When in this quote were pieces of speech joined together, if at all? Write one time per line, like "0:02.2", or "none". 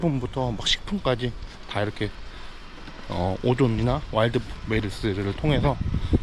none